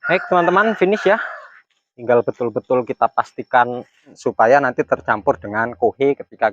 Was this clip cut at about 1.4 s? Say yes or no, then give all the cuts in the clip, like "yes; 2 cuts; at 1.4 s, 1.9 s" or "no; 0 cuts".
no; 1 cut; at 4.2 s